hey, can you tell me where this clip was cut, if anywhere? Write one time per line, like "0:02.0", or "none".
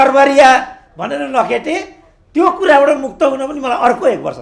none